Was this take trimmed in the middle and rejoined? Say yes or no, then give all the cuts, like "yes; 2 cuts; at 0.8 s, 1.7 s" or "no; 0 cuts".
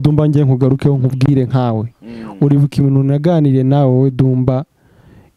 no; 0 cuts